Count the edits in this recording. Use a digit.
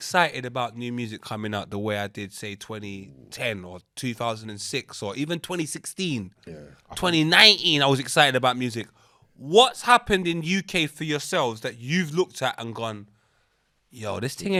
0